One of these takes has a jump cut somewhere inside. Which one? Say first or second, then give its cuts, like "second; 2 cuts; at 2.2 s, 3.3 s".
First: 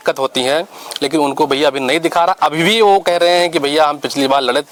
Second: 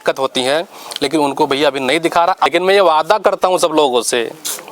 second; 1 cut; at 2.5 s